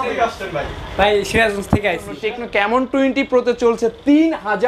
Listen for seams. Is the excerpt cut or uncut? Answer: cut